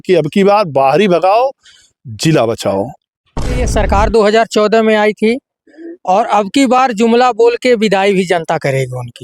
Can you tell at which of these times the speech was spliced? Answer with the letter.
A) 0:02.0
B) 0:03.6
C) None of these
B